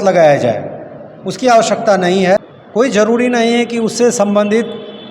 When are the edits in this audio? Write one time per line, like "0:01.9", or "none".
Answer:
0:02.8